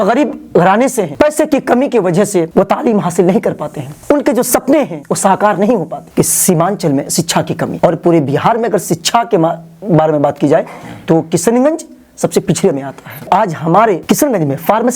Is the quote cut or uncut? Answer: cut